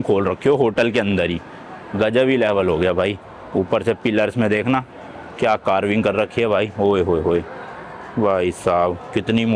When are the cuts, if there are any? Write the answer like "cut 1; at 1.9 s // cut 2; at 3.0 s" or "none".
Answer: none

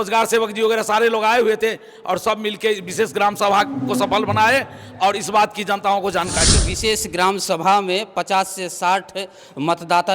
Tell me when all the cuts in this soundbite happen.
cut 1; at 6.6 s

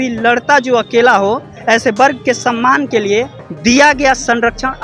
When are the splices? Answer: cut 1; at 1.5 s // cut 2; at 3.4 s

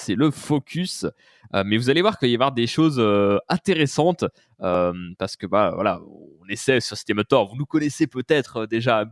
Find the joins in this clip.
none

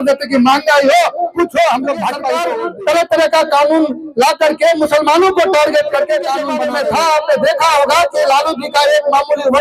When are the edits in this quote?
cut 1; at 2.5 s // cut 2; at 6.5 s

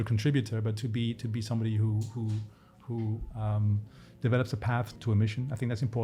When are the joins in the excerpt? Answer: cut 1; at 4.9 s

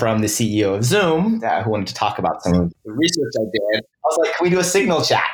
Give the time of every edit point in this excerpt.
cut 1; at 2.7 s // cut 2; at 4.0 s

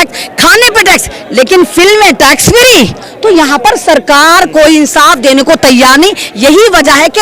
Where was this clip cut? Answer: cut 1; at 3.1 s

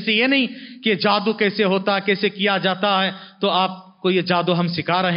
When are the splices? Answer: none

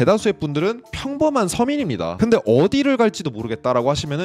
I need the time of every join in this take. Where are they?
cut 1; at 2.1 s

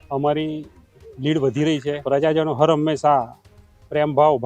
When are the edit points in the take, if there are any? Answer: cut 1; at 2.0 s

